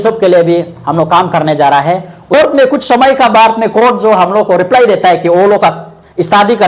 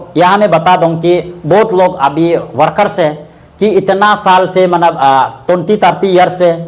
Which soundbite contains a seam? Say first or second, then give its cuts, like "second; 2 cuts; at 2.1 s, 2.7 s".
first; 1 cut; at 2.3 s